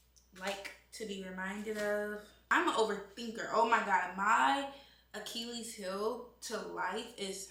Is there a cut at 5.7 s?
no; 1 cut; at 2.4 s

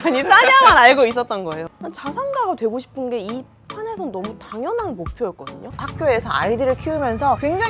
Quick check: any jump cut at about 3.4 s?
no; 2 cuts; at 1.6 s, 5.8 s

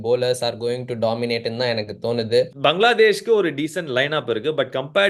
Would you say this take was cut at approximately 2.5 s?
yes; 1 cut; at 2.5 s

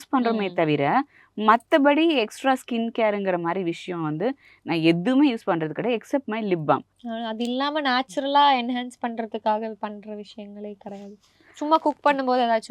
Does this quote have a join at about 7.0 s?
yes; 1 cut; at 7.0 s

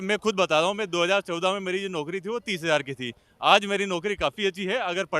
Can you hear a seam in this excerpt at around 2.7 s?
no; 0 cuts

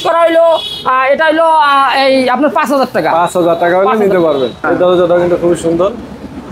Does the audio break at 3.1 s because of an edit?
no; 1 cut; at 4.6 s

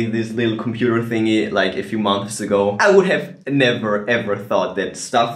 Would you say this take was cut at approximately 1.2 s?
no; 1 cut; at 2.8 s

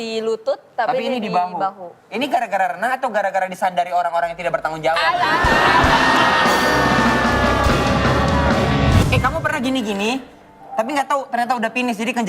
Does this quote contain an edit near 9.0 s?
yes; 1 cut; at 9.0 s

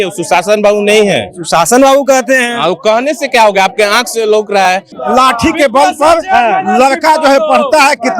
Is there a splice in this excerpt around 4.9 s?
yes; 1 cut; at 4.9 s

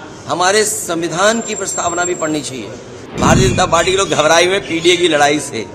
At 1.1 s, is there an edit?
no; 1 cut; at 3.0 s

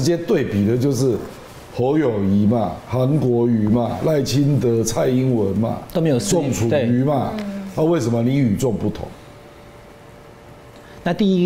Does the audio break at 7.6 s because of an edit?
no; 0 cuts

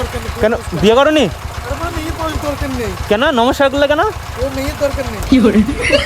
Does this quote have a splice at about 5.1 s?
yes; 1 cut; at 5.1 s

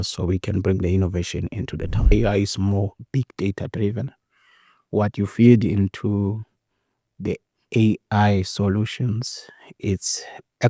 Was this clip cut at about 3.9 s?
no; 1 cut; at 2.1 s

